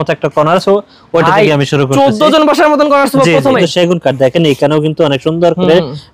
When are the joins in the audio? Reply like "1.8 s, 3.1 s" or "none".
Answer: 3.6 s